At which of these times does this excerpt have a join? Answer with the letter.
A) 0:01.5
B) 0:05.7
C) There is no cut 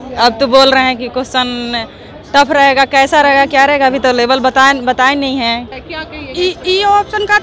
B